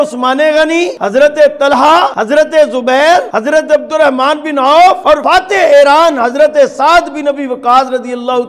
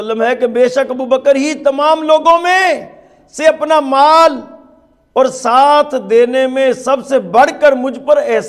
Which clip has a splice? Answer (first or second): first